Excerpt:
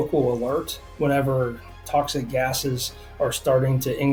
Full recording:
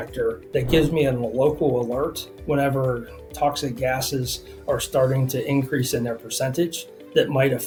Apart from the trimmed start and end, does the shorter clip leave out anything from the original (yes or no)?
no